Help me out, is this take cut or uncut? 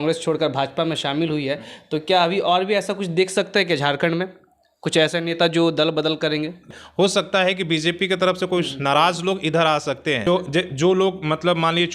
cut